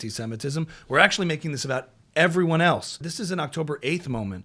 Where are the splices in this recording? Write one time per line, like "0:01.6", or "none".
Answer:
0:03.0